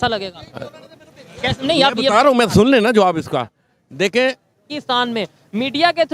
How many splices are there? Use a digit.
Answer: 1